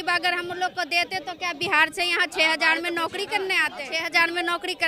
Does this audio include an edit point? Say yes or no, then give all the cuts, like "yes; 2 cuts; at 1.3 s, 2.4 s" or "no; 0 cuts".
yes; 1 cut; at 4.0 s